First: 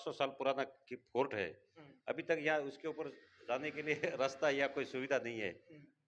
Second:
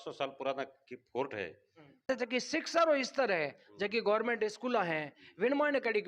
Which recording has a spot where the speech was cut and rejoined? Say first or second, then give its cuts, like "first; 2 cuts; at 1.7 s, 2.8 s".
second; 1 cut; at 2.1 s